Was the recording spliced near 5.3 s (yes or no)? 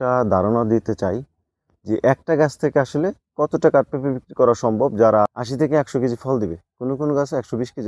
yes